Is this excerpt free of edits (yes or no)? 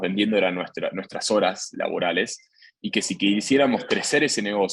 yes